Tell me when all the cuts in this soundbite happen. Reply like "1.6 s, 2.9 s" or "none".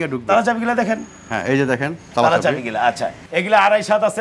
3.3 s